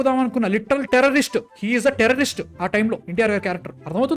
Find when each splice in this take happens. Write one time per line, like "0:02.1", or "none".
0:03.0